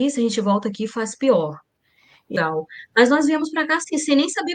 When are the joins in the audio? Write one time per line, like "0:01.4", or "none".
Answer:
0:02.3